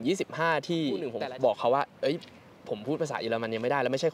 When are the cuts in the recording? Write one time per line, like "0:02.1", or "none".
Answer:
0:01.1